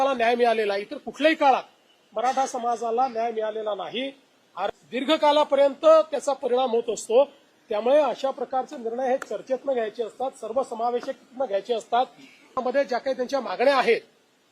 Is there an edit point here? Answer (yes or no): yes